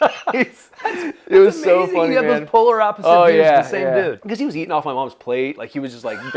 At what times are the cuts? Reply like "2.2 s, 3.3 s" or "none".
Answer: 4.2 s